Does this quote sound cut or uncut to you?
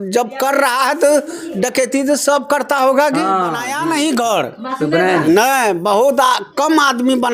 cut